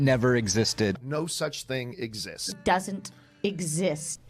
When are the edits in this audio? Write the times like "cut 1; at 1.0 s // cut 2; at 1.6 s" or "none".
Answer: none